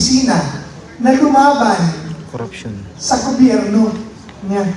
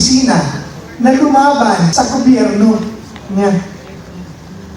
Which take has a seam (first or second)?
second